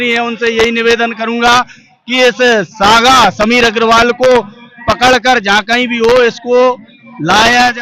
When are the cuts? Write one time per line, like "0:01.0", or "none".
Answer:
none